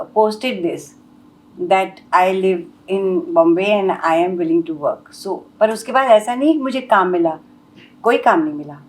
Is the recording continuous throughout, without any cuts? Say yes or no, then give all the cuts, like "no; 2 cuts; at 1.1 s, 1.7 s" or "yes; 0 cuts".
yes; 0 cuts